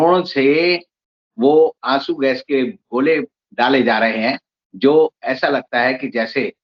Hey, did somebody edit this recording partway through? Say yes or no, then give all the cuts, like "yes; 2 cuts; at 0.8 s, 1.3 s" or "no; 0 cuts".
no; 0 cuts